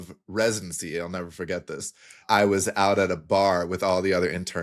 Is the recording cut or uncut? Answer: cut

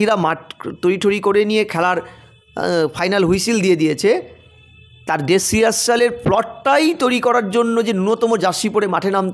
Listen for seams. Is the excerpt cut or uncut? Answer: uncut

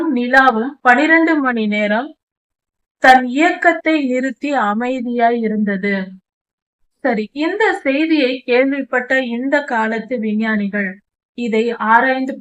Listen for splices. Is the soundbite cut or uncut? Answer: uncut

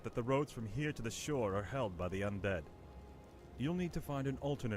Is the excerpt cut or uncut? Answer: cut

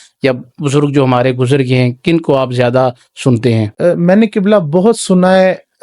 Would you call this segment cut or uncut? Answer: cut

